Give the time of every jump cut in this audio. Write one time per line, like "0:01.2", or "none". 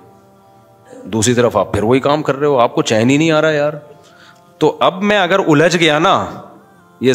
none